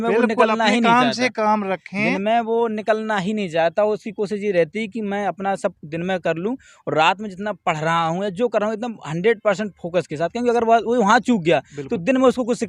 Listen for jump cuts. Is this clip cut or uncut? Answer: uncut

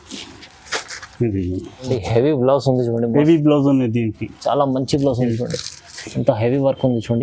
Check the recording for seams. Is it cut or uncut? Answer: cut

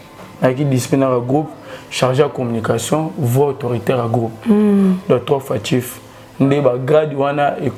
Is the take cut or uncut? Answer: uncut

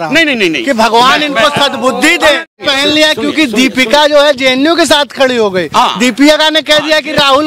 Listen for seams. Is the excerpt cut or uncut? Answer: cut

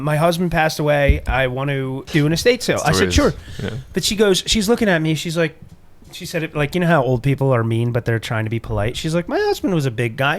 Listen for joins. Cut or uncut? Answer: cut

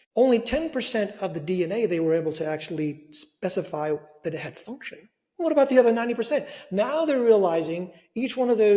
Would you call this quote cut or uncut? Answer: uncut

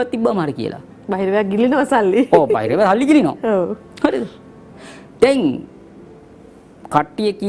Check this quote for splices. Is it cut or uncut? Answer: uncut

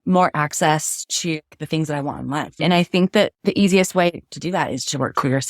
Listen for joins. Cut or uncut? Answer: cut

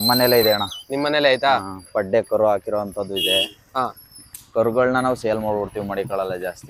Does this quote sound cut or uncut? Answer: uncut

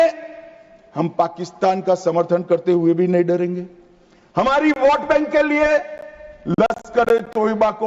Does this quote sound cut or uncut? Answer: uncut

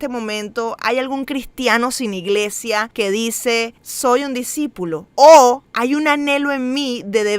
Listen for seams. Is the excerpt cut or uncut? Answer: cut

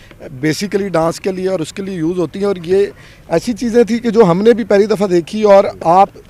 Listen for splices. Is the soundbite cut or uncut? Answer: uncut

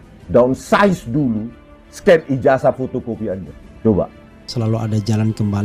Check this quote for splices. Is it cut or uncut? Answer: cut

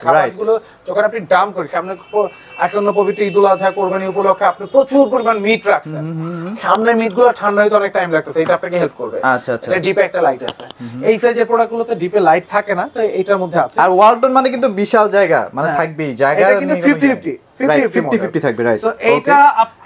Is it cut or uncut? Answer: uncut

